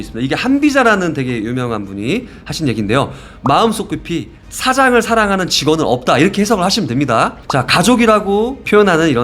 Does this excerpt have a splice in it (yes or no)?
yes